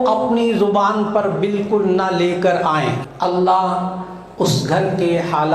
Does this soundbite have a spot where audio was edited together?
yes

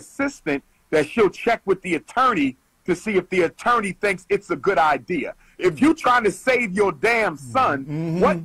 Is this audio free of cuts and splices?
yes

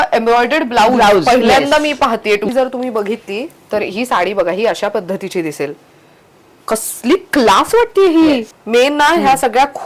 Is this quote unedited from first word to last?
no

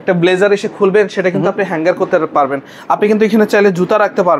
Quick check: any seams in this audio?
no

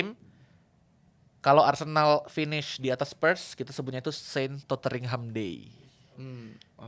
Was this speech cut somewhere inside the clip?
no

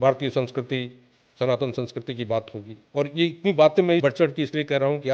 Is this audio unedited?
no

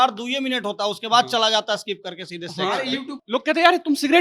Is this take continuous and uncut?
no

